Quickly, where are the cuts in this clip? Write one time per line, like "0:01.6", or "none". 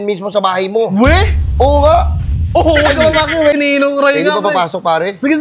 0:03.6